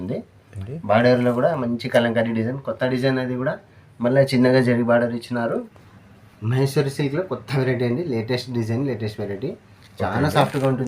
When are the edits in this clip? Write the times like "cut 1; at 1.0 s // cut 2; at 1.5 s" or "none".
cut 1; at 5.7 s